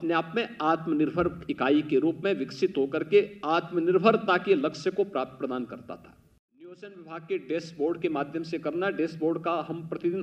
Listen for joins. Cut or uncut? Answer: cut